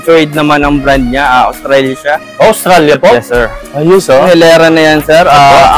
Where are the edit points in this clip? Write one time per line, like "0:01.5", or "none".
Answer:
0:04.2